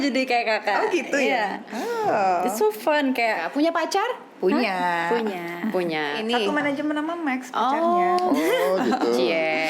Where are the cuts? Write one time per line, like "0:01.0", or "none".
0:03.4
0:06.2